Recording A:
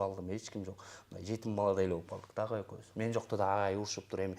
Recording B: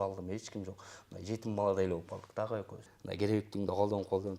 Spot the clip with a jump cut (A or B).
B